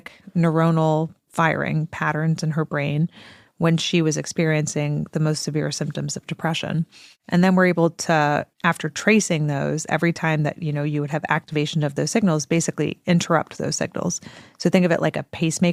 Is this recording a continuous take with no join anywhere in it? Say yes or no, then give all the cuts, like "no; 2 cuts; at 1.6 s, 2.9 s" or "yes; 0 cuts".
yes; 0 cuts